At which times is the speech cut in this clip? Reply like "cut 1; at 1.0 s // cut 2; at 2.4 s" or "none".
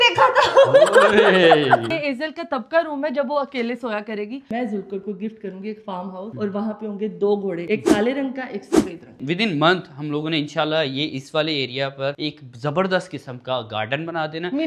cut 1; at 1.8 s // cut 2; at 4.5 s // cut 3; at 9.2 s